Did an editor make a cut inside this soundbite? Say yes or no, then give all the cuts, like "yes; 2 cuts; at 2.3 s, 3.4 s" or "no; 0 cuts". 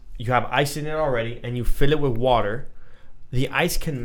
no; 0 cuts